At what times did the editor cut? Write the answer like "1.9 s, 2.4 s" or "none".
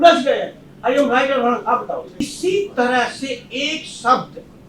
2.1 s